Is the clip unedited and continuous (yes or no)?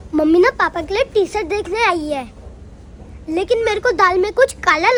yes